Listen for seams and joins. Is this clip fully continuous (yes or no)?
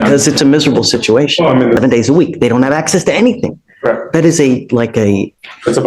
no